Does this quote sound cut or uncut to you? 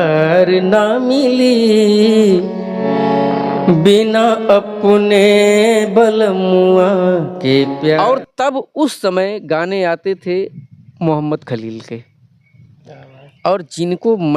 cut